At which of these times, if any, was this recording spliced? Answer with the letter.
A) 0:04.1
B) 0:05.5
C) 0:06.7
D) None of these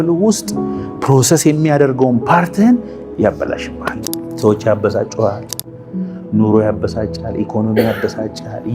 A